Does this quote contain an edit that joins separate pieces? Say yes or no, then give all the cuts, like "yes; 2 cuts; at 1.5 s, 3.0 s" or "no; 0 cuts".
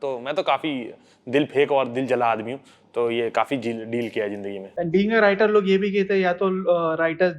no; 0 cuts